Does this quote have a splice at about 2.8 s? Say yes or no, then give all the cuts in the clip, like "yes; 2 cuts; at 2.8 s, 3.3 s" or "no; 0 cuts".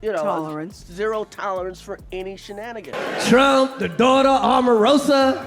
yes; 1 cut; at 2.8 s